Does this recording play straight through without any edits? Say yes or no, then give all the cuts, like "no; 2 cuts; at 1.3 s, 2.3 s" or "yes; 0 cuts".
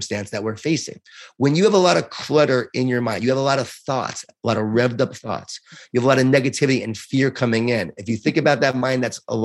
yes; 0 cuts